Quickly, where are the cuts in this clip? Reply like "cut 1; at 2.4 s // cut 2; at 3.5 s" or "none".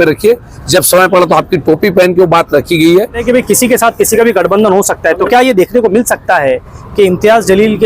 cut 1; at 3.2 s